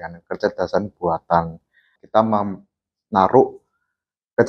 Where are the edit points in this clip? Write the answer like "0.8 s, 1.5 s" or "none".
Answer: 2.0 s